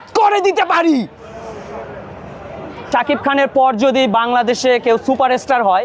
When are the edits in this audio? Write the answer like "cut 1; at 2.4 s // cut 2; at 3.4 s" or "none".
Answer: cut 1; at 2.8 s